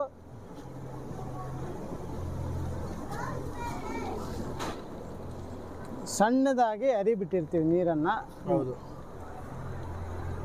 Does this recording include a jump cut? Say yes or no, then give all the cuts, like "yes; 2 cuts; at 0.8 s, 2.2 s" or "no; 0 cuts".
no; 0 cuts